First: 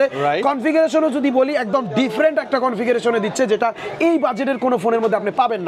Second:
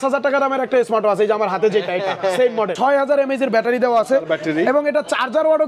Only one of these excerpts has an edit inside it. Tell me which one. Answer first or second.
second